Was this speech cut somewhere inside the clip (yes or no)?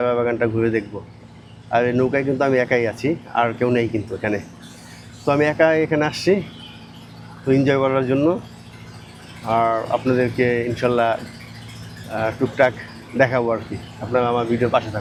no